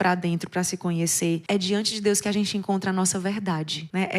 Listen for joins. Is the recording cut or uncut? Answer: cut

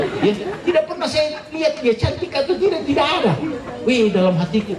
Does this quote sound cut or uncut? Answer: uncut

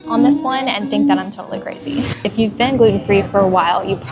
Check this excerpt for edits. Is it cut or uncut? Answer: cut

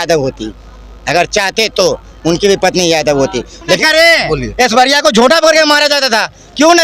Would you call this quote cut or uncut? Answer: cut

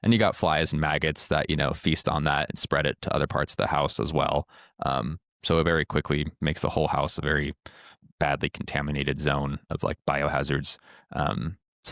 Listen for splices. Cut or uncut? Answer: uncut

